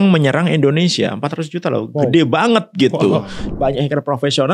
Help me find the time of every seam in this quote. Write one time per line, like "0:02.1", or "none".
0:03.5